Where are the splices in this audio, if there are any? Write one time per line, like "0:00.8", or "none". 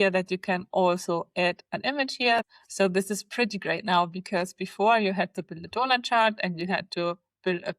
0:02.4